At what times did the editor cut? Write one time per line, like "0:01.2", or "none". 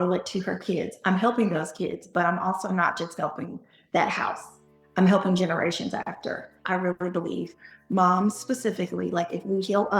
0:06.6